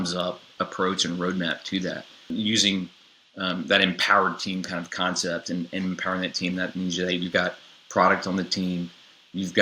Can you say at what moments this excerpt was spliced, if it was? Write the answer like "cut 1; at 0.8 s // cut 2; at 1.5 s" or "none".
cut 1; at 2.3 s